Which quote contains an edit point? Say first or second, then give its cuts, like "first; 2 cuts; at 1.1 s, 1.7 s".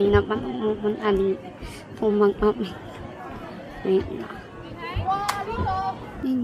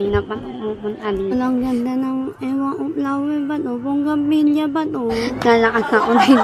second; 2 cuts; at 1.3 s, 5.3 s